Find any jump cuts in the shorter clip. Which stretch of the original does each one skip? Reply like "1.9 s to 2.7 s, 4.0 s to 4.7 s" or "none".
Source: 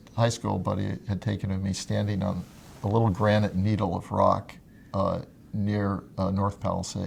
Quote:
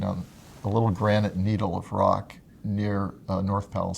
4.7 s to 5.4 s